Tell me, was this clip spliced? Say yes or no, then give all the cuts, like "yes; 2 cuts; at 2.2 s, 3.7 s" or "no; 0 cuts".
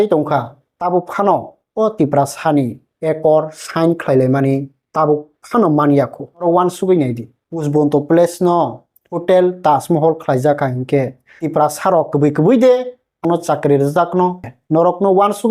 yes; 2 cuts; at 13.2 s, 14.5 s